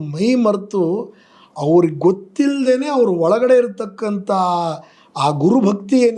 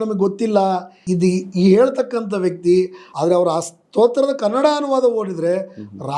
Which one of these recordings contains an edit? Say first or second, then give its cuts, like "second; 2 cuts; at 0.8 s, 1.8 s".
second; 2 cuts; at 1.0 s, 3.0 s